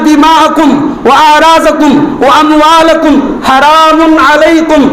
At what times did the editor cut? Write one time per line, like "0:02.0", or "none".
none